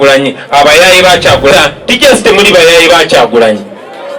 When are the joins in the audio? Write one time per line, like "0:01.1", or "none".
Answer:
0:01.5